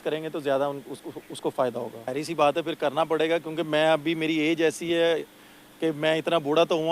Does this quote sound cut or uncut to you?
cut